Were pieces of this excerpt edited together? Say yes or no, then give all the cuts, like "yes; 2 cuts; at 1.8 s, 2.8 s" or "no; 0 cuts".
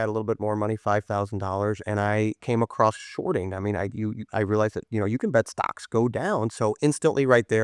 yes; 2 cuts; at 2.4 s, 6.5 s